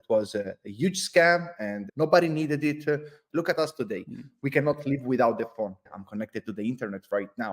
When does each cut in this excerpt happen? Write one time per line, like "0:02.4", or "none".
0:01.8
0:03.2
0:05.8